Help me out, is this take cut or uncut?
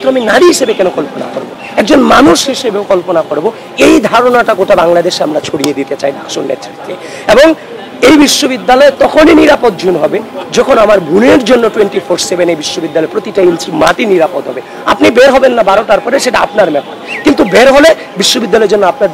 uncut